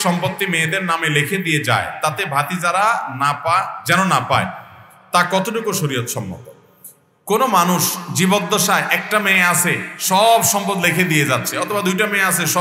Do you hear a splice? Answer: no; 0 cuts

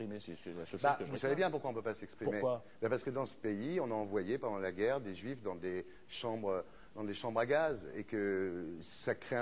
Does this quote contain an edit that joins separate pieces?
yes; 1 cut; at 2.4 s

